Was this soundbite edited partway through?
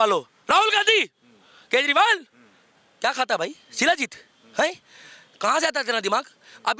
no; 0 cuts

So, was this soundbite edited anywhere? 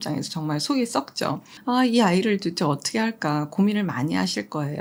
no; 0 cuts

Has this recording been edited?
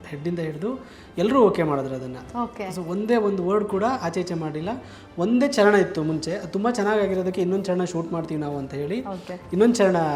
no; 0 cuts

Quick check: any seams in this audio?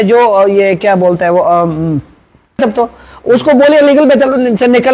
yes; 1 cut; at 2.6 s

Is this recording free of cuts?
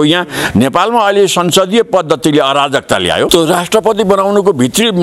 no; 1 cut; at 3.3 s

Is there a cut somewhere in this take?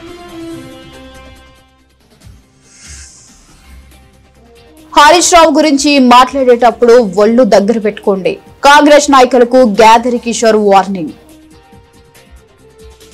no; 0 cuts

